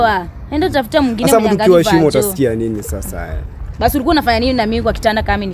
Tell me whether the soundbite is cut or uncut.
uncut